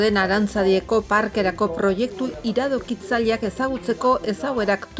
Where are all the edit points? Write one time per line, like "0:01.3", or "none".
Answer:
none